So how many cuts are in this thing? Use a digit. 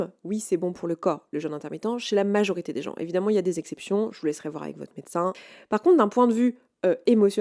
1